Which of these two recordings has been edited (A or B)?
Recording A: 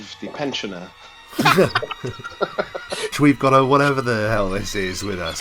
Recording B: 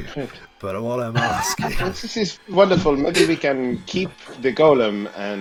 A